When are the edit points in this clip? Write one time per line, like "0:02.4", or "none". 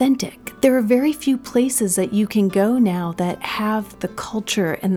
0:03.8